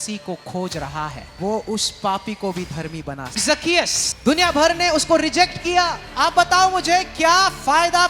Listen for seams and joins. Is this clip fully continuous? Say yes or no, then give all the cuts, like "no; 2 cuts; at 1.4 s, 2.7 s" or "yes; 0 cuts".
no; 3 cuts; at 1.3 s, 3.5 s, 6.1 s